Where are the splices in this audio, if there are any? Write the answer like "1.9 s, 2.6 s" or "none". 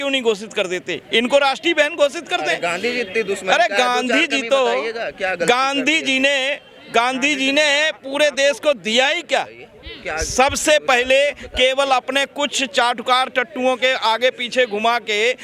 none